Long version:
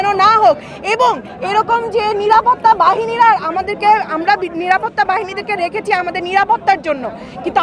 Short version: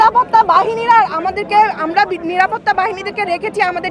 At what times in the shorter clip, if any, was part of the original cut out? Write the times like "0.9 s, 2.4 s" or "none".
none